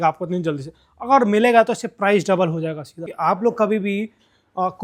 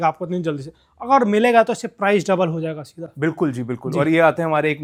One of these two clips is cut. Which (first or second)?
first